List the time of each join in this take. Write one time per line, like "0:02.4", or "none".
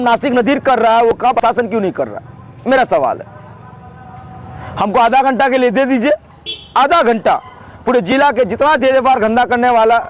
0:01.4